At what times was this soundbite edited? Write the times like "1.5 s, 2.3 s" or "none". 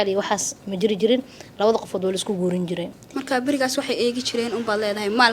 none